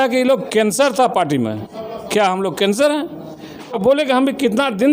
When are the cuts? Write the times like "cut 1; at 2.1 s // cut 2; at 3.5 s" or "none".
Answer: cut 1; at 3.8 s